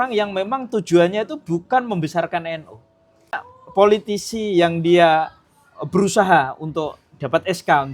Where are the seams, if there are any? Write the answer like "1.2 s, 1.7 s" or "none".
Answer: 3.3 s